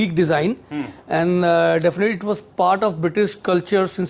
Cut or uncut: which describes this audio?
uncut